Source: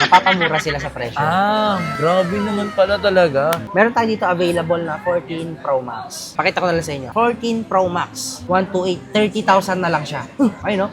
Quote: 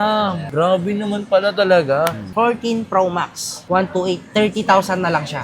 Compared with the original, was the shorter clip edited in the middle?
yes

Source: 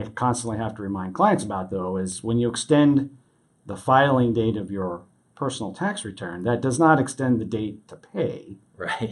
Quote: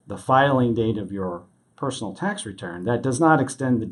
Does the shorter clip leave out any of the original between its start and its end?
no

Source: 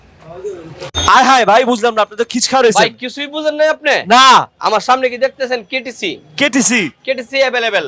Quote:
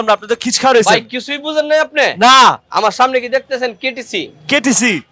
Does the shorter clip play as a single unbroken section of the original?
yes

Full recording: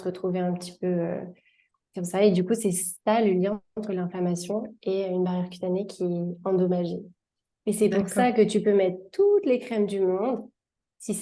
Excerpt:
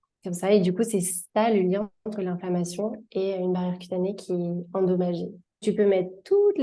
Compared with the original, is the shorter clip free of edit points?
no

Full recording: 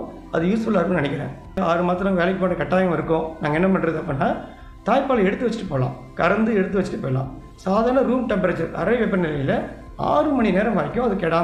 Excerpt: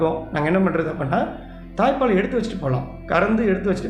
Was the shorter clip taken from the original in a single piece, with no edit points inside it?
yes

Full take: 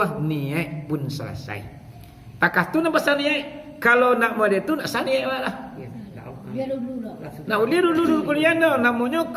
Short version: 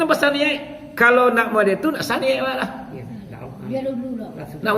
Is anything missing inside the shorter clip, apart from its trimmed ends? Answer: no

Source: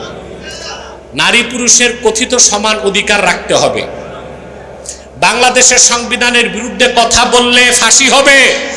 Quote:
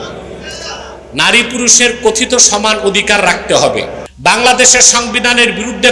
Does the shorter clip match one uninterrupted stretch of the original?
no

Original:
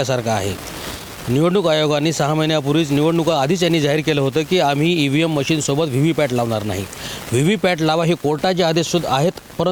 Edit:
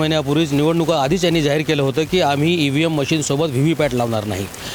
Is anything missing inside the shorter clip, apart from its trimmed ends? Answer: no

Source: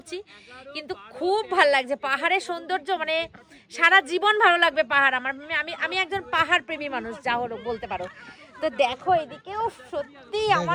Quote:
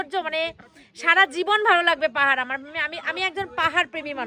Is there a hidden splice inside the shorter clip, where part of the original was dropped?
no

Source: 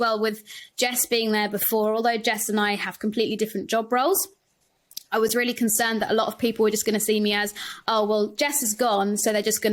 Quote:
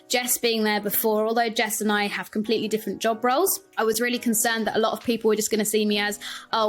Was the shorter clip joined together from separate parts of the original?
yes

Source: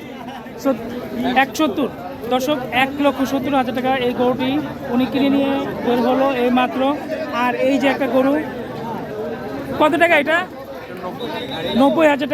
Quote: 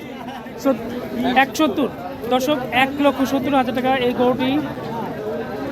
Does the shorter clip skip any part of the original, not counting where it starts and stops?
yes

